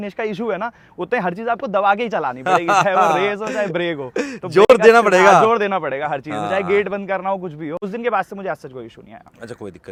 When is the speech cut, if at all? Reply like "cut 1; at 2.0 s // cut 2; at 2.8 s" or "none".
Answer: none

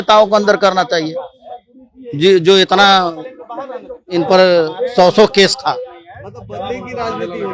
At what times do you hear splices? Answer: none

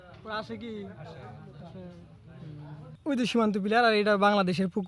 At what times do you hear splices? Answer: cut 1; at 3.0 s

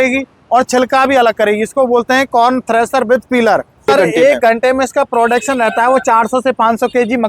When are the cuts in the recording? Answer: cut 1; at 3.9 s

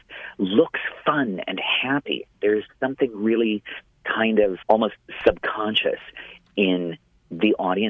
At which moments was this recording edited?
cut 1; at 4.6 s

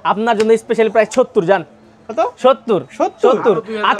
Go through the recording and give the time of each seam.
none

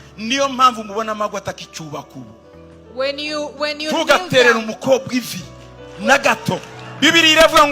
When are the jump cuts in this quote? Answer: cut 1; at 6.8 s

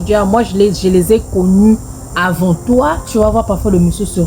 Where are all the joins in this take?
cut 1; at 3.2 s

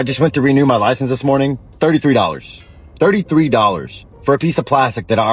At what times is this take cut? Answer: none

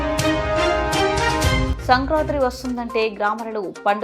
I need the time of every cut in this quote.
cut 1; at 1.7 s

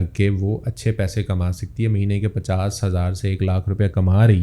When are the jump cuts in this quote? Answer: none

